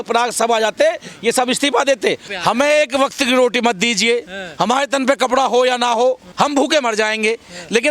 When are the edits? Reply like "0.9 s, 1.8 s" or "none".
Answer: 2.3 s, 6.3 s